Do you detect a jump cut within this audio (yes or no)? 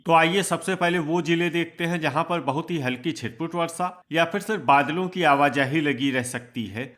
no